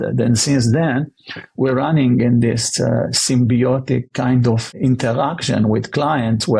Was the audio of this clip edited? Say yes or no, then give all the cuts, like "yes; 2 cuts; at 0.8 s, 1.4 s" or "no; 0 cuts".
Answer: yes; 1 cut; at 4.7 s